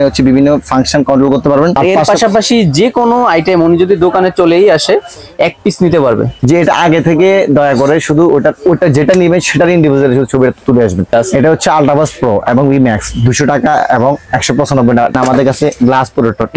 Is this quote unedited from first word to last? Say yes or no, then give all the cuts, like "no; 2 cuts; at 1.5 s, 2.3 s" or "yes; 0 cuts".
no; 3 cuts; at 1.8 s, 11.2 s, 15.1 s